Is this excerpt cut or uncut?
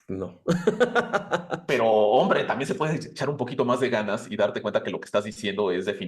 cut